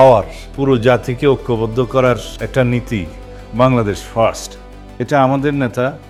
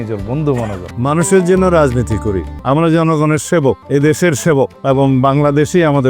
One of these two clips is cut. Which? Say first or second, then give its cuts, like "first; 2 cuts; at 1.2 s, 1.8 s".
second; 4 cuts; at 0.9 s, 2.5 s, 3.8 s, 4.8 s